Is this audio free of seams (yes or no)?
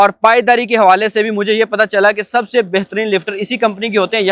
yes